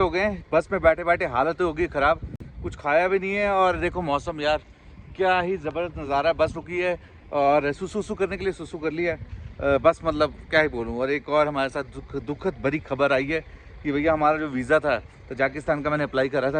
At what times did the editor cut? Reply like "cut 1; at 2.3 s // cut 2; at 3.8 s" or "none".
none